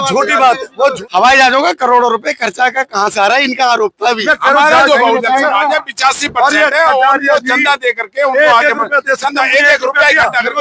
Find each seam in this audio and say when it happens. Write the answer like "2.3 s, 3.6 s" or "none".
1.0 s